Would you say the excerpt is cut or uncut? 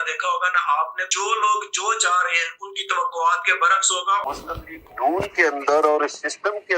cut